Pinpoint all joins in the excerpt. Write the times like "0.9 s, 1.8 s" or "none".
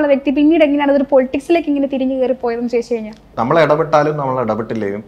3.2 s